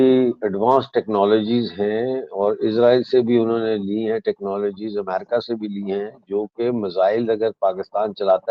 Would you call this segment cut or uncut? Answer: uncut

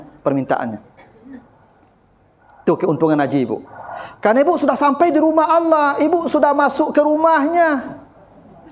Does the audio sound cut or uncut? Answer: uncut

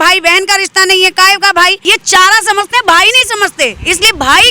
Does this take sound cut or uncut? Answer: cut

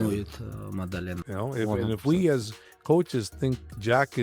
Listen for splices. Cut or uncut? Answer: cut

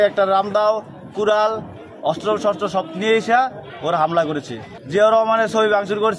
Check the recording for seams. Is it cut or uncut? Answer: uncut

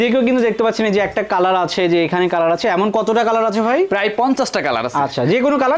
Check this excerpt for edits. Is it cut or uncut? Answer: uncut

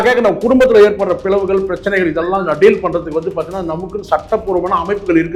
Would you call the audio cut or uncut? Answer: uncut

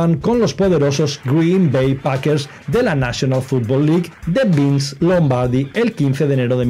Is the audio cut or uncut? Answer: uncut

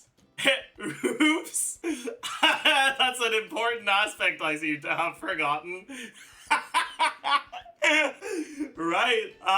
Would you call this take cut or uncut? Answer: cut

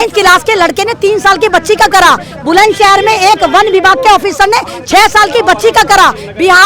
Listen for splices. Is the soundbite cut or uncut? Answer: uncut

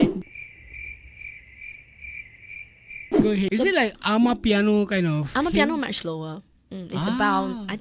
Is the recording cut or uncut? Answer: cut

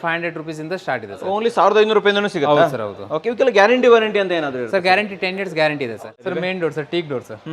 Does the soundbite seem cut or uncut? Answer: cut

